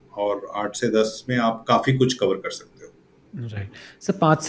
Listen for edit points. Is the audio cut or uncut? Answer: uncut